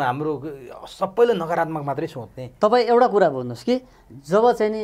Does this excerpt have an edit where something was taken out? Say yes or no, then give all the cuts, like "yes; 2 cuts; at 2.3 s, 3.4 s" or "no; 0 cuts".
no; 0 cuts